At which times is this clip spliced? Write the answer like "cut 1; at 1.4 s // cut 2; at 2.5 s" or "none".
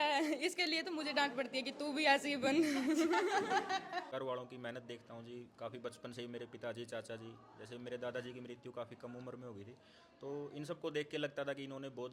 cut 1; at 4.0 s